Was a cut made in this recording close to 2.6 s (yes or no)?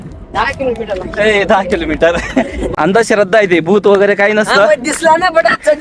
yes